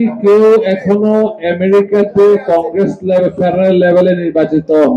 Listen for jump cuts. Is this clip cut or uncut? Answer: uncut